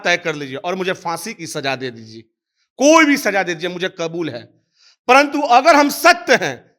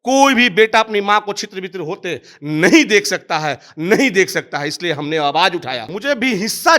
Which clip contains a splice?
second; 1 cut; at 5.9 s

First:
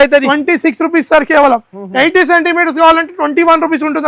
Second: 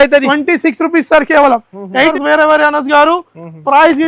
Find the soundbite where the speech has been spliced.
second; 1 cut; at 2.1 s

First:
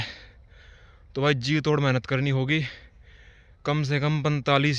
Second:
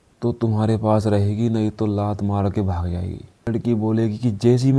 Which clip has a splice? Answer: second; 1 cut; at 3.5 s

